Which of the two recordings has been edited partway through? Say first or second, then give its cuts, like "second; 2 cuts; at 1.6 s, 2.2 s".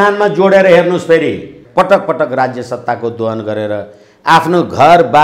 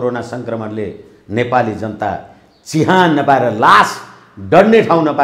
first; 1 cut; at 1.6 s